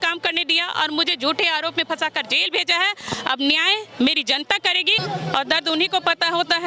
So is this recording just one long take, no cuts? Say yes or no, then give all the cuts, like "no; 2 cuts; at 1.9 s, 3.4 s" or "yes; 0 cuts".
no; 1 cut; at 5.0 s